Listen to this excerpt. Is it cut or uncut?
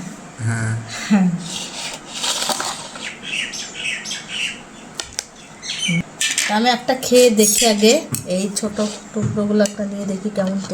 cut